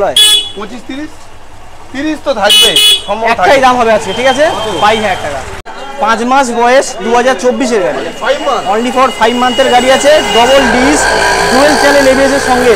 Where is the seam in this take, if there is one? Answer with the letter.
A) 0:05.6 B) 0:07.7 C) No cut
A